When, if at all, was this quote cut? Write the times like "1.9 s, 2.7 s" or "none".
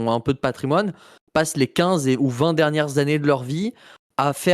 none